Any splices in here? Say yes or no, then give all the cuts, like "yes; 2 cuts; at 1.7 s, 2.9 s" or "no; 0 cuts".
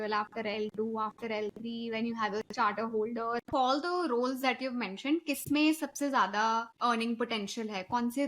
yes; 2 cuts; at 3.5 s, 6.7 s